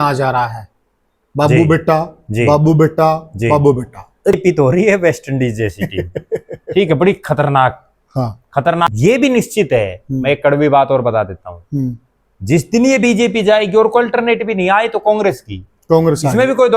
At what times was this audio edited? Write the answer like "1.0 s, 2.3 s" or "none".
4.4 s, 8.9 s